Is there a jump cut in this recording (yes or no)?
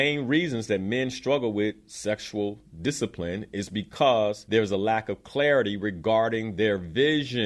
yes